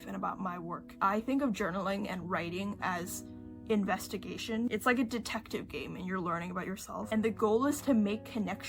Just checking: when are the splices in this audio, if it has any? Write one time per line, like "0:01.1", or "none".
0:01.0